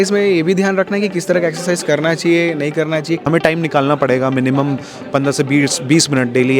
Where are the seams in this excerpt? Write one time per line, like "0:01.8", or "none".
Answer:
0:03.2